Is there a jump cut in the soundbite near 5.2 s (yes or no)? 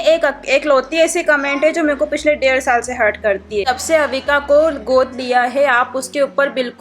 no